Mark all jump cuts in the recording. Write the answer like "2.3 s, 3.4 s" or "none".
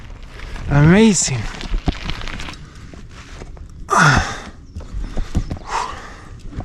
2.4 s